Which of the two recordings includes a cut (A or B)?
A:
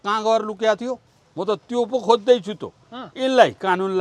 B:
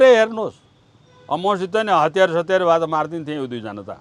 A